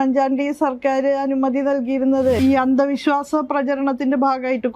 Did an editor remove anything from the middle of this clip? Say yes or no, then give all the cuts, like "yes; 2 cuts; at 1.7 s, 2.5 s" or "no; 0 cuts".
yes; 1 cut; at 2.4 s